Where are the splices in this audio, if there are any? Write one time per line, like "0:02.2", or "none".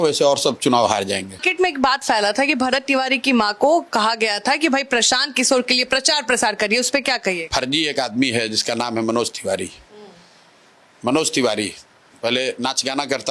0:01.4
0:07.4